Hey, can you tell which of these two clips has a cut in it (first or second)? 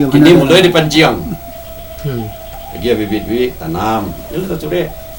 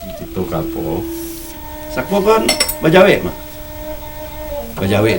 second